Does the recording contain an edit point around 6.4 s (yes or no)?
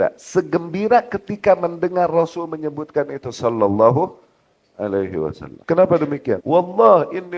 yes